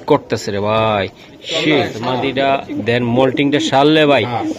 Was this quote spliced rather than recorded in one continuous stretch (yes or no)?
yes